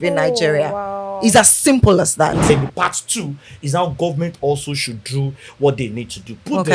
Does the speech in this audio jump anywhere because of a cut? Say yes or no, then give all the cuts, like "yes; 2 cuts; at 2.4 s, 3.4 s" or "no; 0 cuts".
yes; 1 cut; at 2.5 s